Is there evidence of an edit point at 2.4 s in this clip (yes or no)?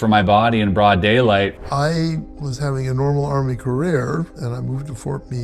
yes